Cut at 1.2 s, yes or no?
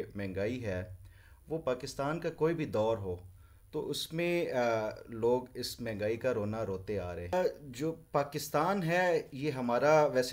no